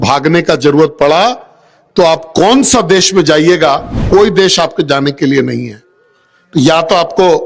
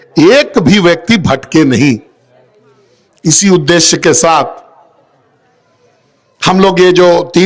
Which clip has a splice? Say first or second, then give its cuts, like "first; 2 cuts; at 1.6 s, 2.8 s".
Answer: first; 1 cut; at 3.9 s